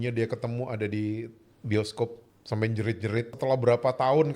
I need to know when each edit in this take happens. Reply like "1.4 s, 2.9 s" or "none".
2.3 s, 3.3 s